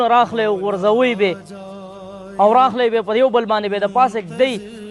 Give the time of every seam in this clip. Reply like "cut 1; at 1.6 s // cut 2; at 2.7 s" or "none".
none